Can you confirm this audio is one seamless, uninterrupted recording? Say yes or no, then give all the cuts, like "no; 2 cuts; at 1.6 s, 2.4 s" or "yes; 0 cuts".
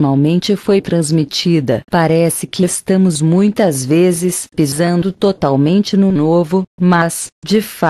no; 1 cut; at 1.4 s